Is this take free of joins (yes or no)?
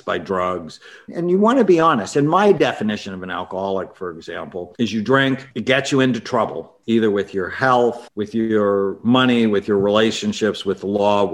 no